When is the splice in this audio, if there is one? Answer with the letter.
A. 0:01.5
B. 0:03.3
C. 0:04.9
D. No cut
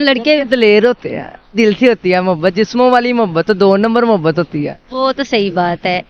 A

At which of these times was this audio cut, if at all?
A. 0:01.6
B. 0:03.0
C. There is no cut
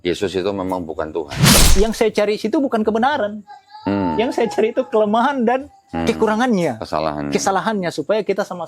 A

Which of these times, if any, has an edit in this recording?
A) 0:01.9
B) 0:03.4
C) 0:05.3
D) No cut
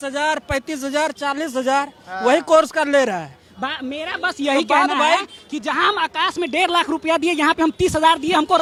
D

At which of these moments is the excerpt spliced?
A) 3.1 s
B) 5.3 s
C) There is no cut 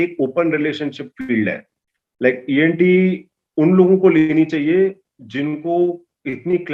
C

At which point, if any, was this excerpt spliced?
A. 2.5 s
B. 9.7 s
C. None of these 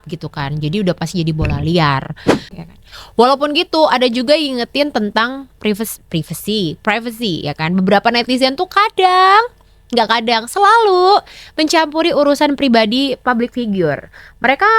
A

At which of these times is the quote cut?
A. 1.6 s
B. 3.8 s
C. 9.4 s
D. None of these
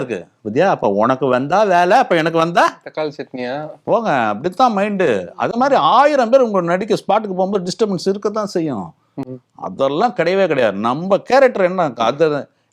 D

